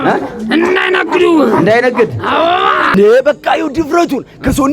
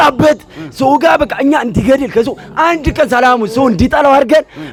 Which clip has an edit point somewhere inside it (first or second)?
first